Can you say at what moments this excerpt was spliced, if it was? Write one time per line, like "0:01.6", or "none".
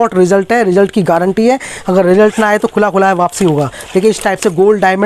none